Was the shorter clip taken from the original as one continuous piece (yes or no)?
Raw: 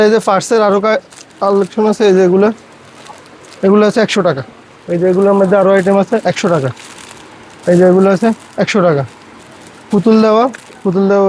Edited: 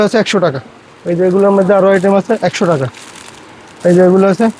yes